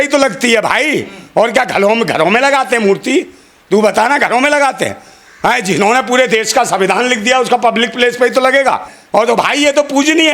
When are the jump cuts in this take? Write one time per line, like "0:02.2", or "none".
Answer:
0:08.9